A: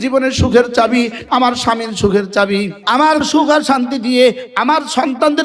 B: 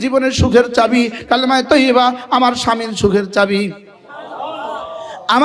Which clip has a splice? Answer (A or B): A